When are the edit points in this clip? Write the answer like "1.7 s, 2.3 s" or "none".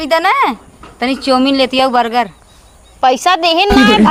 none